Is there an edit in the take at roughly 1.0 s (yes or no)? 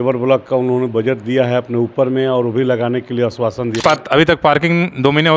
no